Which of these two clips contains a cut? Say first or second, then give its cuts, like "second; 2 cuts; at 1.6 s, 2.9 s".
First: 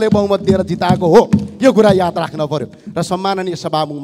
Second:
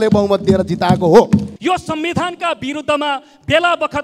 second; 1 cut; at 1.5 s